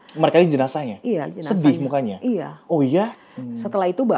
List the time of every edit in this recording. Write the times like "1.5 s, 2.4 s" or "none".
3.2 s